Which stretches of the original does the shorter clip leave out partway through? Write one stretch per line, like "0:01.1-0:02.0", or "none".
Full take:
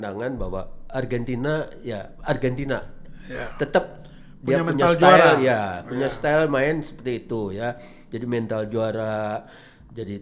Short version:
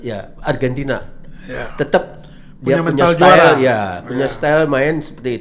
none